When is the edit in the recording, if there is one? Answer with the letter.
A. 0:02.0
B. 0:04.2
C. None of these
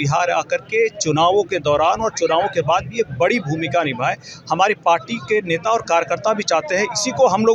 C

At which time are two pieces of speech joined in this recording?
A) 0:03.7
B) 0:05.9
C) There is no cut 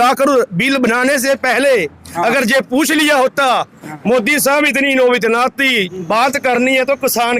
B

